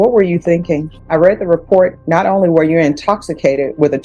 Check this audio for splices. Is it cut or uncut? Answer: cut